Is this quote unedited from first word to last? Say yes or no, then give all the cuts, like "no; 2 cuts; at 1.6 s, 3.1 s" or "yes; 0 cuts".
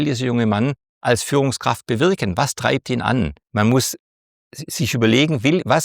no; 1 cut; at 3.4 s